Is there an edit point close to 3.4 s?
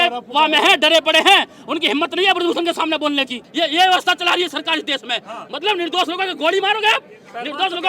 yes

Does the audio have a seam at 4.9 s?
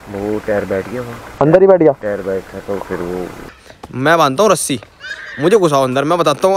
no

